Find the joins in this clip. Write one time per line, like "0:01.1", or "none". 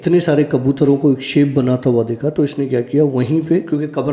none